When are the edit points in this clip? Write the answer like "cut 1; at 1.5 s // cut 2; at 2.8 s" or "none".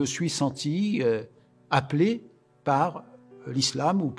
none